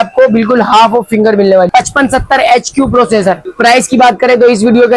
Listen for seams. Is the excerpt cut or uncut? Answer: cut